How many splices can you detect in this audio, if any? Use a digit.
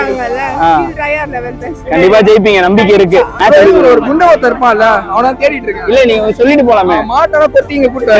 1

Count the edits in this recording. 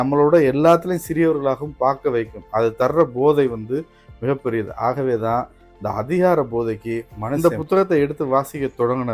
1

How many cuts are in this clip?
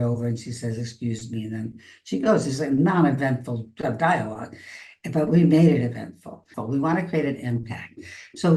1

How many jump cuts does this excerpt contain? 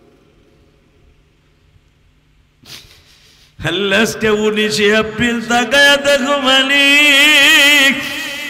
0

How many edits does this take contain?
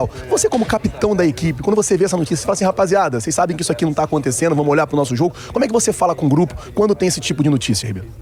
0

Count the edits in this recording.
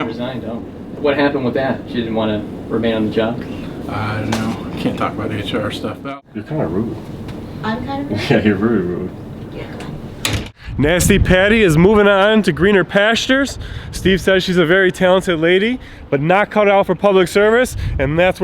3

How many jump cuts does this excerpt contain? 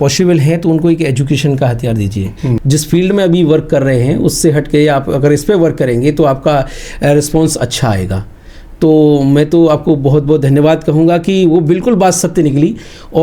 1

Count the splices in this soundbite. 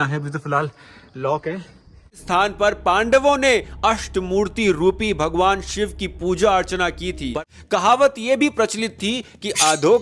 2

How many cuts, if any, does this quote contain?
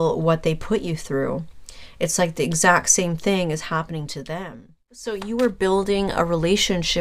1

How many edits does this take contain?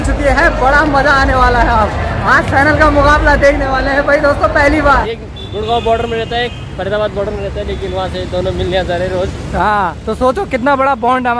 1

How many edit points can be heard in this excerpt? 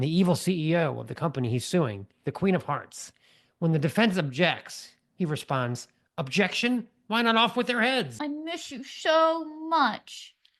1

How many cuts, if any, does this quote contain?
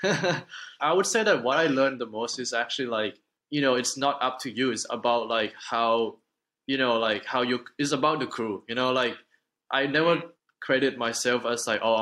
3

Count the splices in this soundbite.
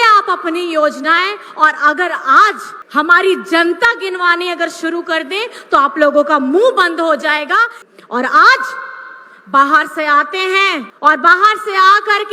3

